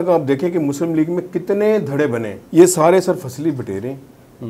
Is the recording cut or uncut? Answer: cut